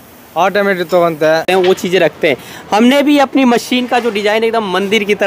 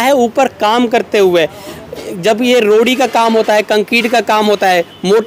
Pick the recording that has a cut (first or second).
first